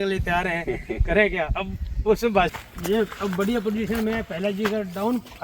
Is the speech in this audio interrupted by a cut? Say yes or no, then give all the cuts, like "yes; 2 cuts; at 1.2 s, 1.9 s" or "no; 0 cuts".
yes; 1 cut; at 2.5 s